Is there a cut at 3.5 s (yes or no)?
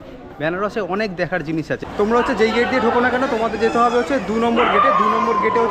no